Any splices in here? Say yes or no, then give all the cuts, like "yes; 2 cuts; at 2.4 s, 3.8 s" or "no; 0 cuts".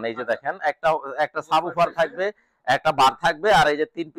no; 0 cuts